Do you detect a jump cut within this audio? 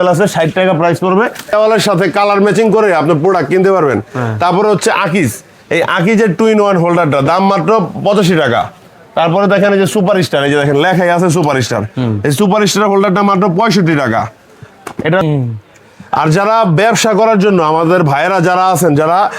yes; 2 cuts; at 1.5 s, 15.2 s

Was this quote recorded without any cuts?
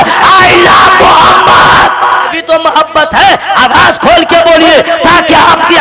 no; 1 cut; at 2.4 s

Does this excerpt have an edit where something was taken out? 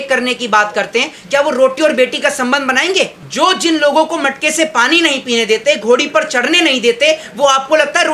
no; 0 cuts

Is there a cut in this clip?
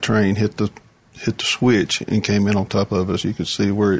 no; 0 cuts

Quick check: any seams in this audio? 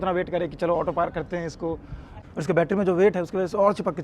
yes; 1 cut; at 2.1 s

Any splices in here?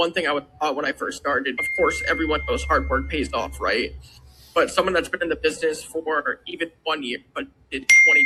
no; 0 cuts

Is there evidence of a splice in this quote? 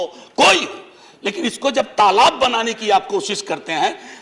no; 0 cuts

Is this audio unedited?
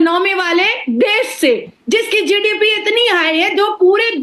yes; 0 cuts

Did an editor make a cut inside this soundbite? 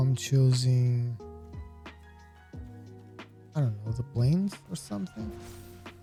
no; 0 cuts

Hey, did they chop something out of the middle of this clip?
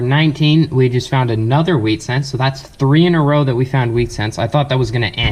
no; 0 cuts

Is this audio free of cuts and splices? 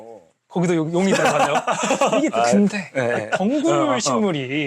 no; 1 cut; at 2.3 s

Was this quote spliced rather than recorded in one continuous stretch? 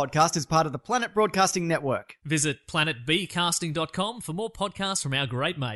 no; 0 cuts

